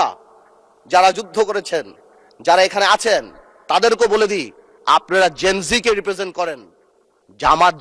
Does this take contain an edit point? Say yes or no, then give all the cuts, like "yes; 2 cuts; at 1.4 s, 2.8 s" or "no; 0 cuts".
no; 0 cuts